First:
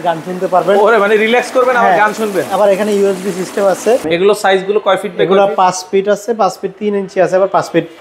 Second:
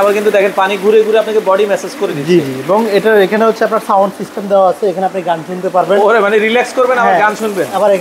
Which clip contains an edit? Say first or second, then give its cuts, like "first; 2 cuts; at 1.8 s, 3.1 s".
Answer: first; 1 cut; at 4.0 s